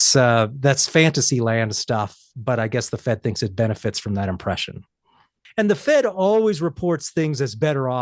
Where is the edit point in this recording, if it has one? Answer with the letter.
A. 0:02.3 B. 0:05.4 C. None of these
B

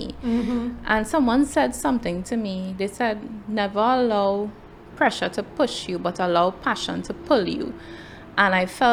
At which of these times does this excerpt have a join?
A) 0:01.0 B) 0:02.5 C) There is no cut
C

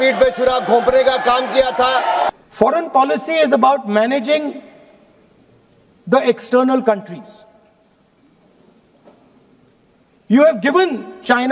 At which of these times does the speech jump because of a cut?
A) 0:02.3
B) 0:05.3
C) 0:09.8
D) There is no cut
A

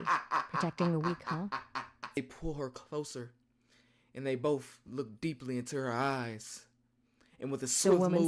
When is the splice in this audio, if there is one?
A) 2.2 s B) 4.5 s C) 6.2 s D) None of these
A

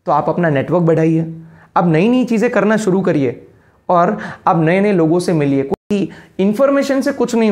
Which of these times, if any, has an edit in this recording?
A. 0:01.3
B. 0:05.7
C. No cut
B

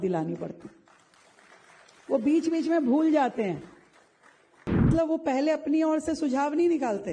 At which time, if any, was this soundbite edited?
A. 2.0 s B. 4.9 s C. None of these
B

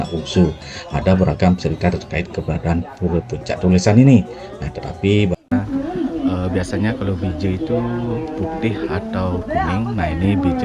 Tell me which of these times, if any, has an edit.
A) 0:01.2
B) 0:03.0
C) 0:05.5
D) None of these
C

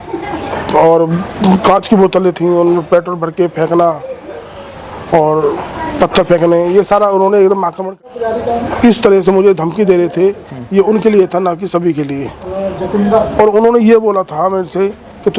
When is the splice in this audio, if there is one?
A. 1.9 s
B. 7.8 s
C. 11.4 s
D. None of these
B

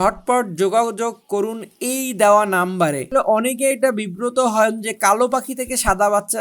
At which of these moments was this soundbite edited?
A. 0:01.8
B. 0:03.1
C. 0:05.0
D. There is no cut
B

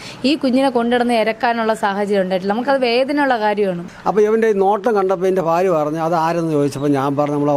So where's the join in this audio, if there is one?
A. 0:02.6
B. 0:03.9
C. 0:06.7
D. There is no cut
B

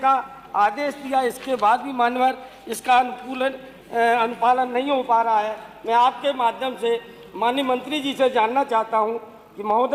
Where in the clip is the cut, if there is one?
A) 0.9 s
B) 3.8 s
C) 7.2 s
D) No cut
D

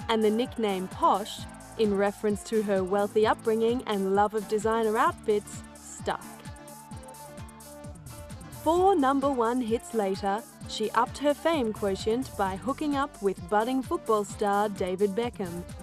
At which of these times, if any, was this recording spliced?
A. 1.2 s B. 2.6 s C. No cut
C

